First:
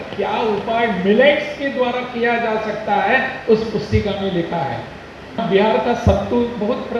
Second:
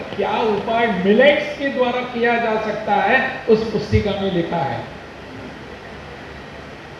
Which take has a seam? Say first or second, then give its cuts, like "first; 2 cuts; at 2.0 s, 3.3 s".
first; 1 cut; at 5.4 s